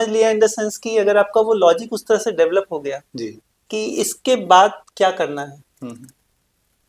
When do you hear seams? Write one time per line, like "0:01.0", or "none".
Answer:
none